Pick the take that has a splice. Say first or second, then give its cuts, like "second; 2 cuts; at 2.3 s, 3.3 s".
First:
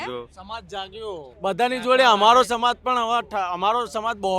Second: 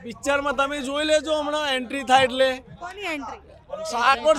first; 1 cut; at 1.3 s